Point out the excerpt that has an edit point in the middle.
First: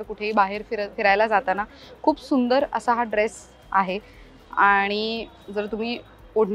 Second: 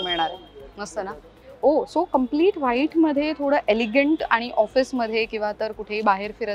second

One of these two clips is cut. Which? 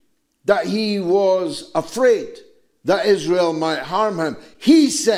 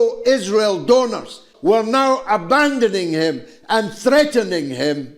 second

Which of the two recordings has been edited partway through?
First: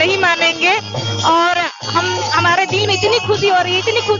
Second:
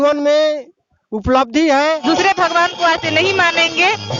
second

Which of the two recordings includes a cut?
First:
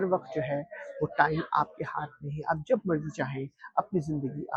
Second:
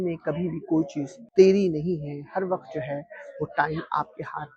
second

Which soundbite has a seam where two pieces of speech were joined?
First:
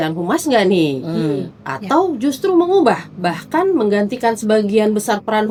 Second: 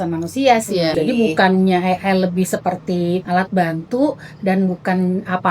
second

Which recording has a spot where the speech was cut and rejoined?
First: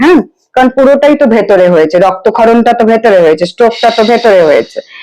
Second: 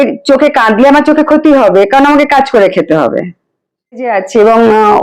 second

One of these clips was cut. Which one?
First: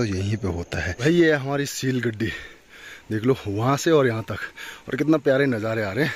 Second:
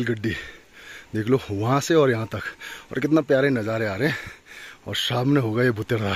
first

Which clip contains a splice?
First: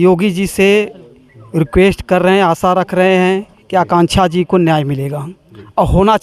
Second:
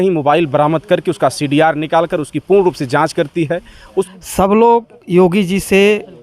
second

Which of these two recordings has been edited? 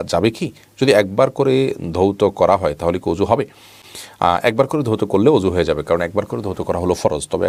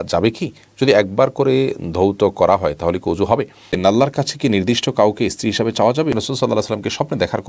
second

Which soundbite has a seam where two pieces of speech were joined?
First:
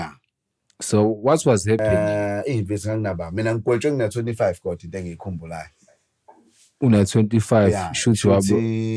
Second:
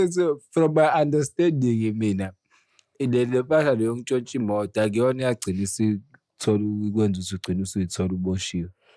first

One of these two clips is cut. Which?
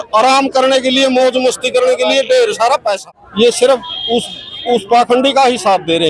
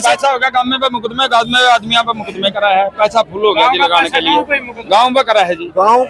first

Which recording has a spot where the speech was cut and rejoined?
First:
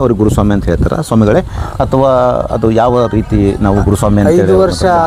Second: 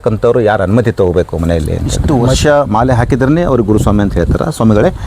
second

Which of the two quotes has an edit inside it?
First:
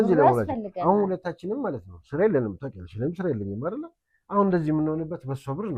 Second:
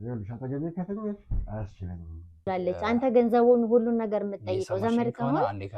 second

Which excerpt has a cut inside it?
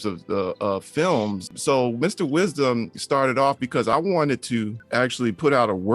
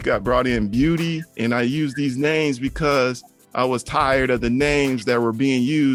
first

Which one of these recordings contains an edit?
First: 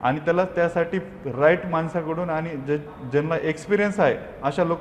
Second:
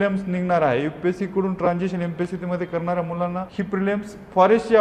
second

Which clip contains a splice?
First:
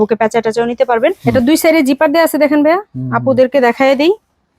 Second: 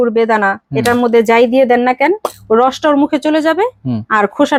first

